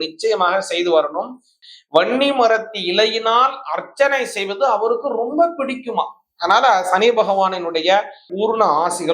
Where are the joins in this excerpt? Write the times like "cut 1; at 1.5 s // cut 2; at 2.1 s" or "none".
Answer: cut 1; at 1.5 s // cut 2; at 8.3 s

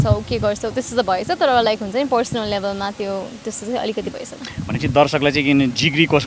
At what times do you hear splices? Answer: none

